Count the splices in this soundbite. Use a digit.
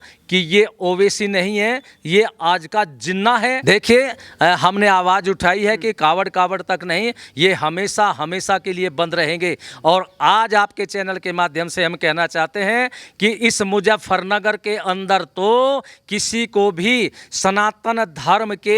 1